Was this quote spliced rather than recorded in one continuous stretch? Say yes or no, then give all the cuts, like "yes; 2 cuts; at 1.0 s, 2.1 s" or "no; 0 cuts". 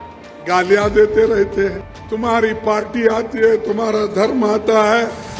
yes; 1 cut; at 1.9 s